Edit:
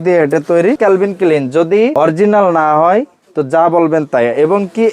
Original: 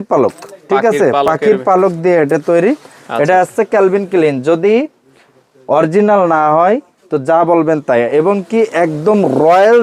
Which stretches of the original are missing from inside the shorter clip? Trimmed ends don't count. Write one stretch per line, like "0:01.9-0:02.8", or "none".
0:02.8-0:03.7
0:04.8-0:05.7